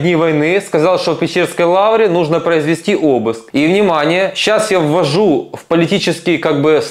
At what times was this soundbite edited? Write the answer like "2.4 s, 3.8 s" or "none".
3.4 s